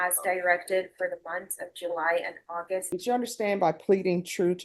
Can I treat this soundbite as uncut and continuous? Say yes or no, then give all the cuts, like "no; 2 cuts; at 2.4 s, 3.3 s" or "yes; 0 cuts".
no; 1 cut; at 2.8 s